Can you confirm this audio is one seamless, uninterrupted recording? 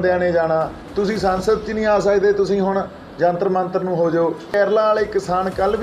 no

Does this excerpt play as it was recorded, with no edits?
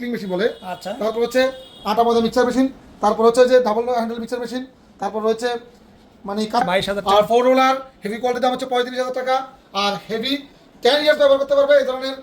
no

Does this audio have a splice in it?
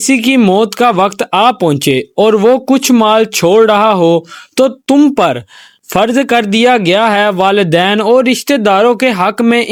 no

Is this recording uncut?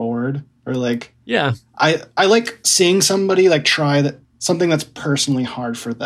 no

